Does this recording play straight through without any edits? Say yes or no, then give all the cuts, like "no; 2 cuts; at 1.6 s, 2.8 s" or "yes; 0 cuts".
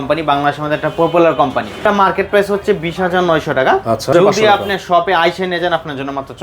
no; 2 cuts; at 1.8 s, 4.1 s